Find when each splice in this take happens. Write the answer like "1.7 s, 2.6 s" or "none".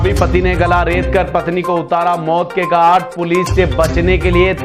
none